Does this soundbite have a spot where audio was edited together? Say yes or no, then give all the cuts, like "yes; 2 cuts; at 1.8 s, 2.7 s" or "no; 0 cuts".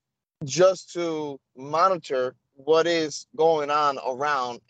no; 0 cuts